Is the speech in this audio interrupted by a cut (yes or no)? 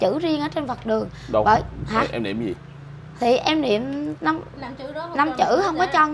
no